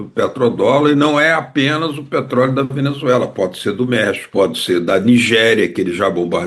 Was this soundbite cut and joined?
yes; 1 cut; at 4.2 s

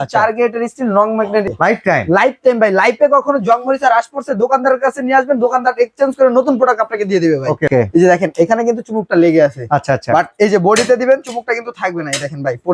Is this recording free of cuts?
no; 2 cuts; at 1.5 s, 7.7 s

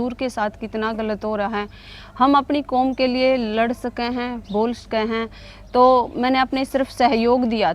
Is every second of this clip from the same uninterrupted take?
yes; 0 cuts

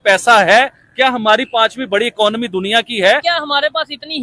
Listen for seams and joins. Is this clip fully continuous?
no; 1 cut; at 3.2 s

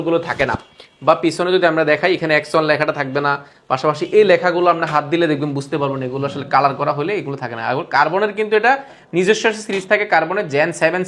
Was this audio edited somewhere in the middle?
no; 0 cuts

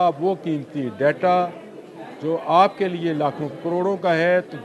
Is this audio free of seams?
yes; 0 cuts

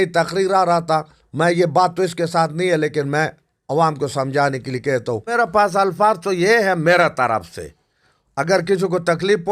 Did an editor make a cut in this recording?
yes; 1 cut; at 5.3 s

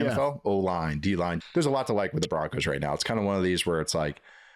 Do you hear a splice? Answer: yes; 1 cut; at 1.4 s

